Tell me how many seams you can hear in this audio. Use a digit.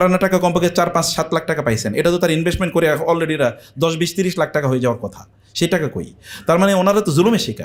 0